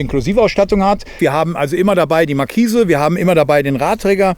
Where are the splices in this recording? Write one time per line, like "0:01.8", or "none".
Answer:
0:01.2

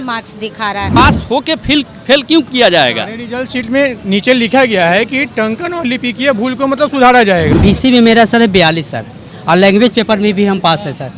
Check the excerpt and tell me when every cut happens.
0:01.0
0:07.5

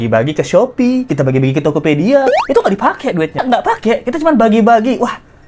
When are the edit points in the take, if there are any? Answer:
0:03.4

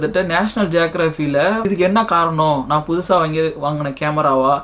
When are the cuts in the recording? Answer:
0:01.6

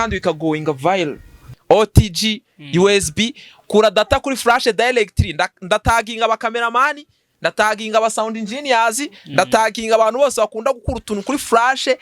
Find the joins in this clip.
0:01.5

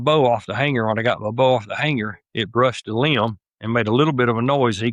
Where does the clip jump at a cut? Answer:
none

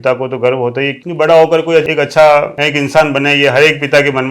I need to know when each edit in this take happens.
0:01.0

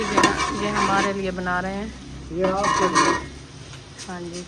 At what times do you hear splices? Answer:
none

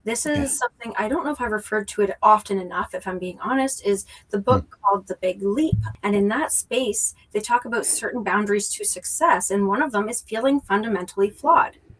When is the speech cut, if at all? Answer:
0:05.9

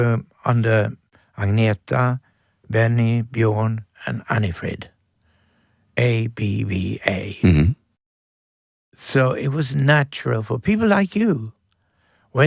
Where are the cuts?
none

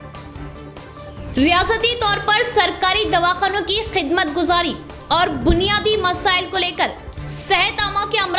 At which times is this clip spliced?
none

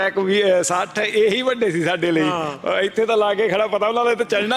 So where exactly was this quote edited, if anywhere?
none

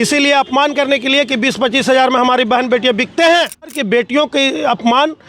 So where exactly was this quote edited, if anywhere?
0:03.8

